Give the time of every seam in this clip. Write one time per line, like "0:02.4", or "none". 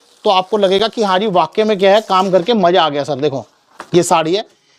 none